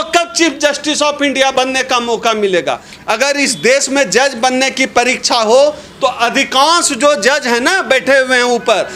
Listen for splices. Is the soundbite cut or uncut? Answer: cut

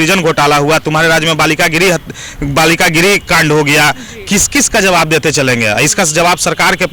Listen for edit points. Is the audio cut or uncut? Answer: uncut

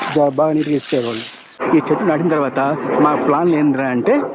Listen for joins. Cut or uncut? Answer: cut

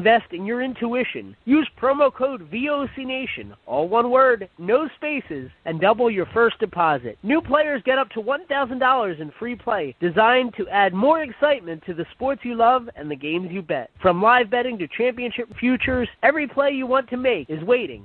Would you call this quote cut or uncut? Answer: uncut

